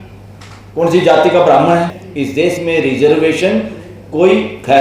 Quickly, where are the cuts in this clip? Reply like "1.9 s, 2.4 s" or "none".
2.0 s